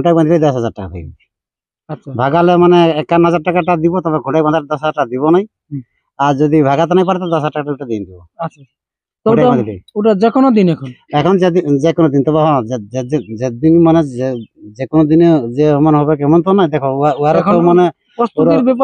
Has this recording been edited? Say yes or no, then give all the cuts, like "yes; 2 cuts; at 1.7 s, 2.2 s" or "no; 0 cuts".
no; 0 cuts